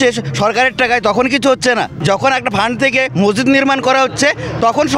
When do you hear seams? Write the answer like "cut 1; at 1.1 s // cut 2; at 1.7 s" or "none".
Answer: cut 1; at 1.9 s